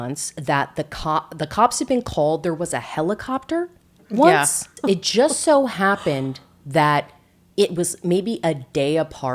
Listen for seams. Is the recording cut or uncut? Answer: cut